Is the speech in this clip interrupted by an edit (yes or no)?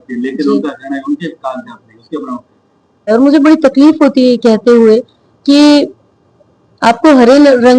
yes